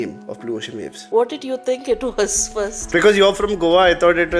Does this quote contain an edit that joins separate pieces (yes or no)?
yes